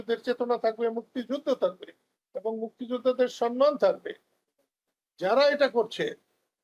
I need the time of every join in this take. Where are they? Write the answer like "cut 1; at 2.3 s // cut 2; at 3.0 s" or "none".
none

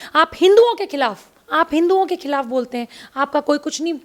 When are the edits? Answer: none

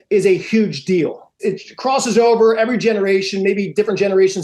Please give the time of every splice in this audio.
cut 1; at 1.4 s

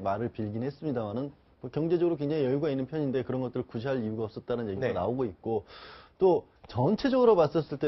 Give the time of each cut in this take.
cut 1; at 4.3 s

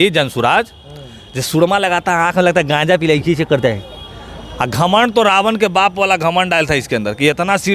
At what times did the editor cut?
none

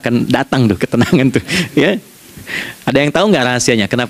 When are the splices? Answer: none

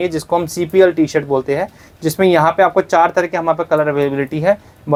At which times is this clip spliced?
none

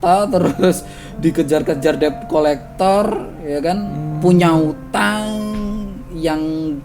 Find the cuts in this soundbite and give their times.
none

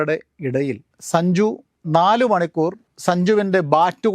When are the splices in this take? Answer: cut 1; at 1.7 s // cut 2; at 2.9 s

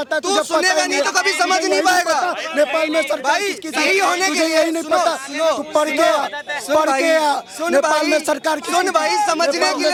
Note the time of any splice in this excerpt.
none

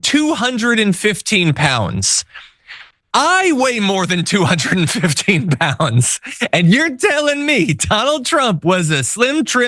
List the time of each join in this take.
cut 1; at 2.5 s

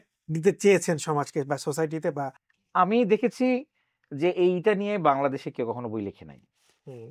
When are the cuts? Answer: cut 1; at 2.5 s

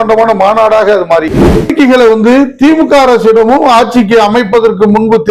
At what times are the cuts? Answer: cut 1; at 1.7 s

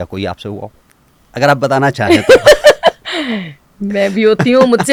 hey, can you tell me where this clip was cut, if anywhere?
none

